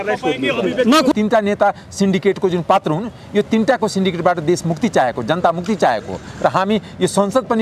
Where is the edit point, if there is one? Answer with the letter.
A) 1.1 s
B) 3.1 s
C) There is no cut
A